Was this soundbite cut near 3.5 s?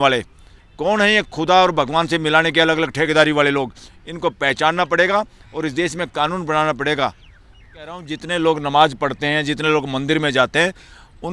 no; 1 cut; at 8.1 s

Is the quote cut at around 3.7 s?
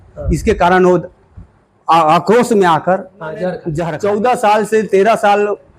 yes; 1 cut; at 3.7 s

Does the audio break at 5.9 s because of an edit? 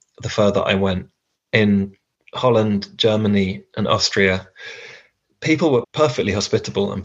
yes; 1 cut; at 5.9 s

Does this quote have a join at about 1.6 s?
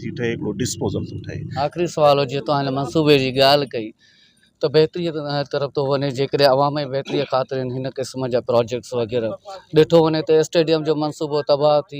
yes; 1 cut; at 1.6 s

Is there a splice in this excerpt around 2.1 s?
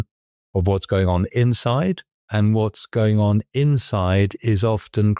yes; 1 cut; at 2.1 s

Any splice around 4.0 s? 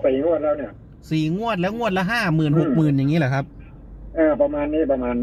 no; 0 cuts

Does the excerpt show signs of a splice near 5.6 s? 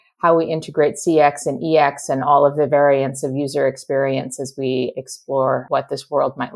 yes; 1 cut; at 5.6 s

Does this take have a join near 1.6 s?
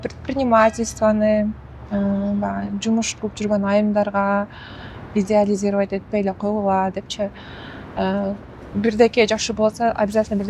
no; 0 cuts

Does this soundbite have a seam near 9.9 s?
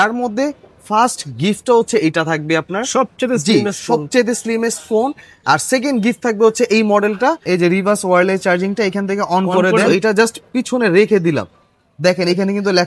yes; 2 cuts; at 7.4 s, 9.9 s

